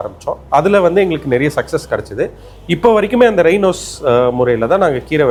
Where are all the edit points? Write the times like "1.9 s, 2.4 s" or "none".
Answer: none